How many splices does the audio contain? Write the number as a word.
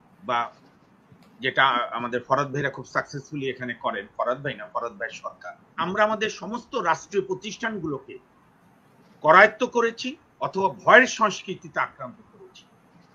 one